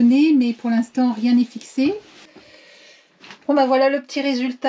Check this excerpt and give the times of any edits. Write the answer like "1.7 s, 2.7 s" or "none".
2.3 s